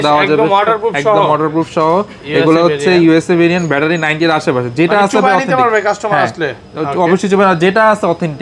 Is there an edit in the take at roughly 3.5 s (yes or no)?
no